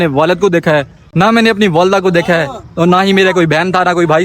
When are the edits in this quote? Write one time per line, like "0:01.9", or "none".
0:01.0

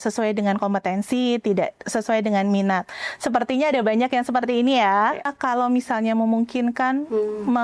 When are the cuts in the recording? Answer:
0:05.3

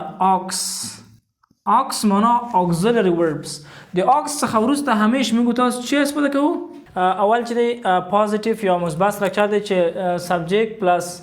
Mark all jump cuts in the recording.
0:06.8

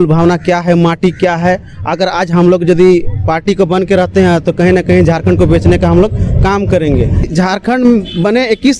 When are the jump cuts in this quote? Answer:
0:07.3

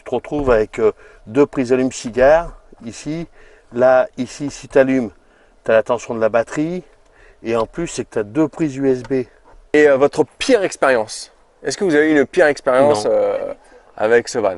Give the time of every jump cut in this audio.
0:09.7

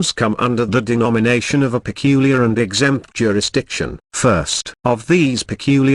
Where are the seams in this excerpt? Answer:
none

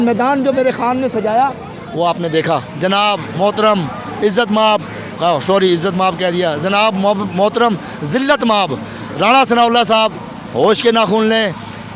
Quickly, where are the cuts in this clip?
0:02.7

